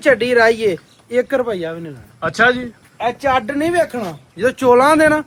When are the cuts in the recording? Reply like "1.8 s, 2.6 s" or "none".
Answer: none